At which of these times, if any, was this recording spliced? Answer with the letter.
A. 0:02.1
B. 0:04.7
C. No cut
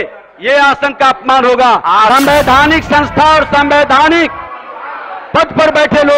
A